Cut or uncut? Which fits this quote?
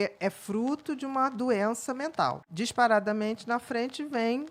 cut